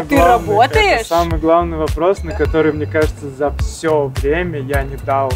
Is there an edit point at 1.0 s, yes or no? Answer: no